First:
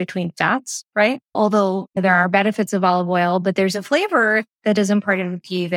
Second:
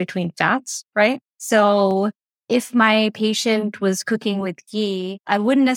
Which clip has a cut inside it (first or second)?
first